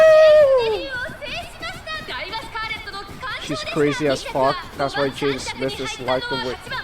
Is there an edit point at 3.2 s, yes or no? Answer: yes